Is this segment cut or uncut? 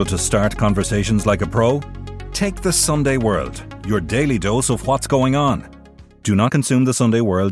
uncut